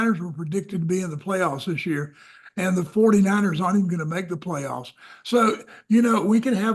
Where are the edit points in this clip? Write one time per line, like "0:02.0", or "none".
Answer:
none